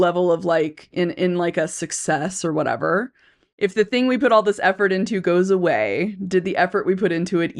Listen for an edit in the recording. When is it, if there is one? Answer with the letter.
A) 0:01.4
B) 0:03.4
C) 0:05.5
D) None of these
B